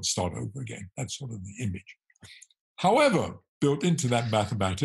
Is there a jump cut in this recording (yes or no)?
yes